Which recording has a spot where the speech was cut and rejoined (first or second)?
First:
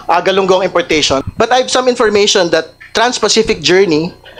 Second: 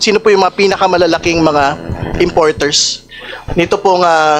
first